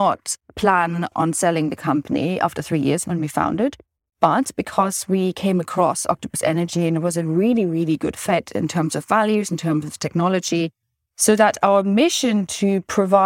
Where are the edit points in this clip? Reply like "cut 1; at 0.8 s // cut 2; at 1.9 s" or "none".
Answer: cut 1; at 1.1 s